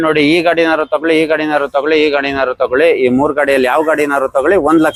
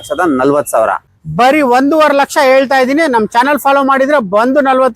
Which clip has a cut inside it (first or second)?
second